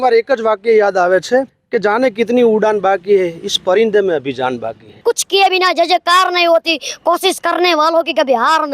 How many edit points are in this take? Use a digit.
2